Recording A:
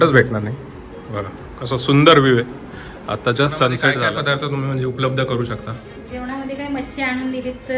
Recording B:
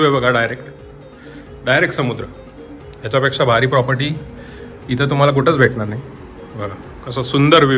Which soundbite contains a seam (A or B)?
A